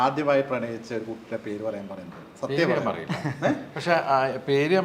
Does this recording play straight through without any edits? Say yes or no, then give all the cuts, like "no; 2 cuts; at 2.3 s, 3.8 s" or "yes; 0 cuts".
yes; 0 cuts